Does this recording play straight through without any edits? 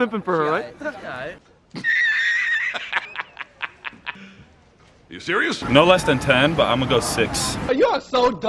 no; 2 cuts; at 4.2 s, 5.6 s

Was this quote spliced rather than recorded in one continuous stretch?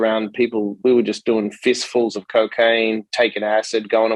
no; 0 cuts

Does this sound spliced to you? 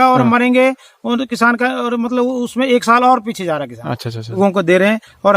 yes; 1 cut; at 4.4 s

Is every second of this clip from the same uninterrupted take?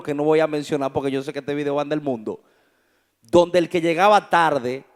yes; 0 cuts

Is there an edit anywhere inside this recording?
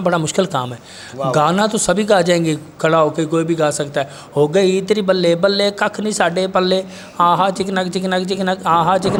no; 0 cuts

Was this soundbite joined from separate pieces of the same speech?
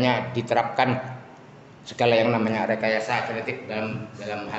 no; 0 cuts

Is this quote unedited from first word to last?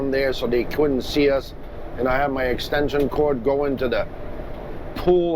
yes; 0 cuts

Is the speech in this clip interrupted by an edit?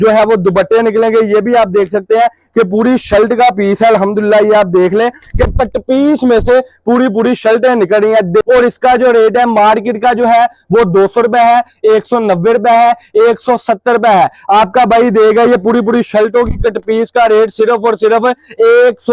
yes; 1 cut; at 8.4 s

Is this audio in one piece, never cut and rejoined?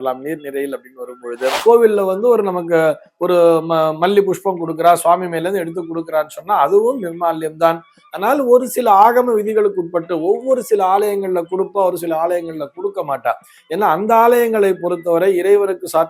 no; 1 cut; at 1.6 s

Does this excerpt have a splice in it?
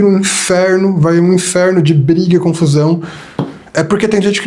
no; 0 cuts

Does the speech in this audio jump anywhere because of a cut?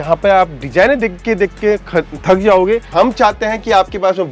yes; 1 cut; at 2.9 s

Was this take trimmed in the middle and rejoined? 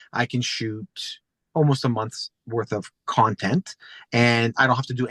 no; 0 cuts

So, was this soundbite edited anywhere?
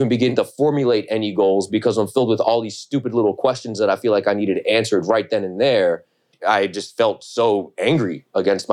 yes; 1 cut; at 6.3 s

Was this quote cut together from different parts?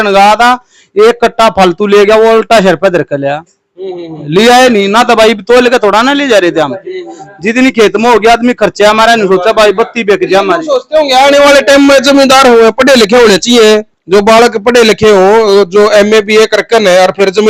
no; 0 cuts

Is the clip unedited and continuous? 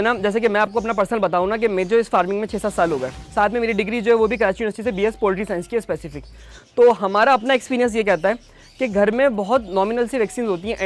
yes; 0 cuts

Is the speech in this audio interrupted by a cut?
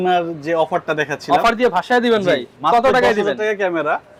no; 0 cuts

